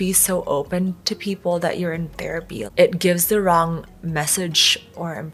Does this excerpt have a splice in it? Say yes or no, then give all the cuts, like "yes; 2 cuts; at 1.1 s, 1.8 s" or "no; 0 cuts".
no; 0 cuts